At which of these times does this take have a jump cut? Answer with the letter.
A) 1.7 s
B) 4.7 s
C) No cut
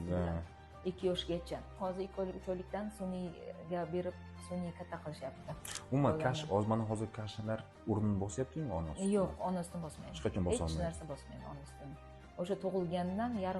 A